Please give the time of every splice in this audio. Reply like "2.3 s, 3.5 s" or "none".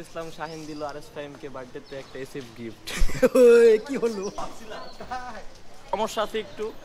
4.4 s, 5.9 s